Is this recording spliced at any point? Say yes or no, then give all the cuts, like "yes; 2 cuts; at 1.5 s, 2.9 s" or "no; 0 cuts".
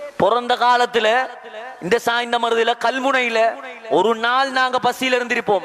no; 0 cuts